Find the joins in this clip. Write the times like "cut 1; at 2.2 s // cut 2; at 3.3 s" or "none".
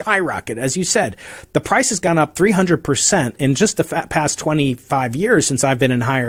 none